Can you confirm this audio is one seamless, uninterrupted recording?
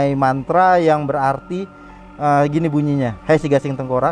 no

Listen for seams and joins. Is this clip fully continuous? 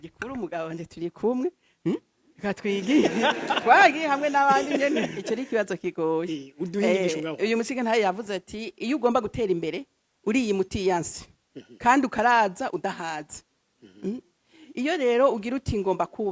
no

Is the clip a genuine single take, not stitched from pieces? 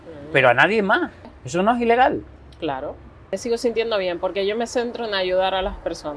no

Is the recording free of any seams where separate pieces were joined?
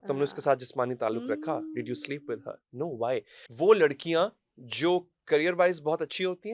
no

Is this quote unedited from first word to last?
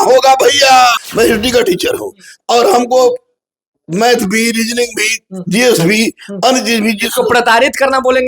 no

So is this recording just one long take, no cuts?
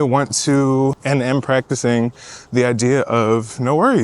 no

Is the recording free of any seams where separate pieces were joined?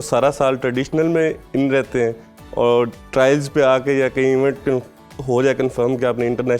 yes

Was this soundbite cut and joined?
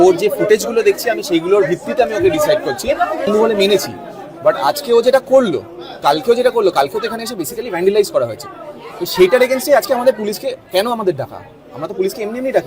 yes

